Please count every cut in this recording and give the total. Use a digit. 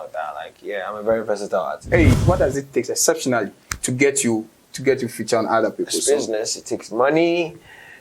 1